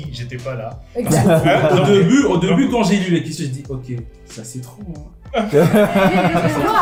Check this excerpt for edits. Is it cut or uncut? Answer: uncut